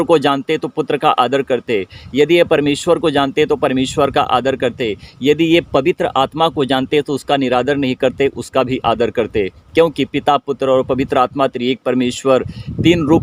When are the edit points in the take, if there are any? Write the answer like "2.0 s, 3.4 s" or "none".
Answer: none